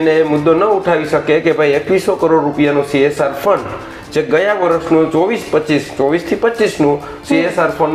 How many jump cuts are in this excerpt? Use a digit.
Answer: 0